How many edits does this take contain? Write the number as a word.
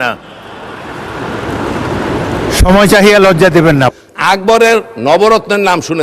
one